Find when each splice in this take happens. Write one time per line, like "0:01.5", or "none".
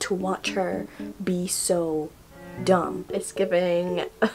0:03.1